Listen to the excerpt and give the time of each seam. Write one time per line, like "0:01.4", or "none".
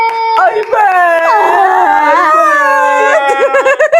none